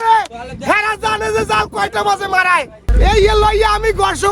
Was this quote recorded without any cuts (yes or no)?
no